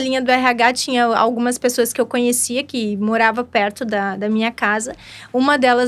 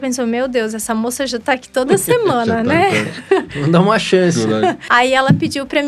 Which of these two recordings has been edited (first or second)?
second